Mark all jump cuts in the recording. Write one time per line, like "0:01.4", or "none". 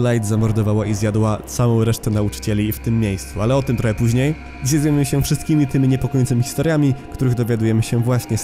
none